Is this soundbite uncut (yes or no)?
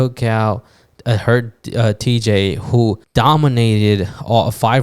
no